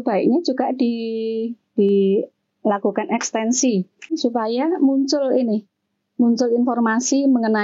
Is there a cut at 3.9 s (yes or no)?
no